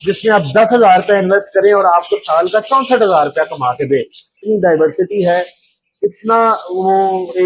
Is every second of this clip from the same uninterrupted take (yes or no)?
no